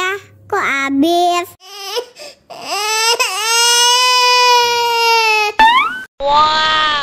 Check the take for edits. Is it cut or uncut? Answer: uncut